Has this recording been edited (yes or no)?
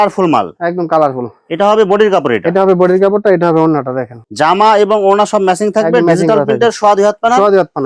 no